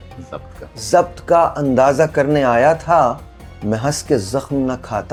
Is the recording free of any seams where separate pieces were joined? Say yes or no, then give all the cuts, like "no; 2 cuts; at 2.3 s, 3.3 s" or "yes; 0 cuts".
yes; 0 cuts